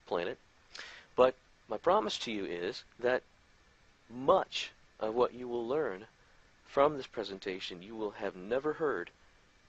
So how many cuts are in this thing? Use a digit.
1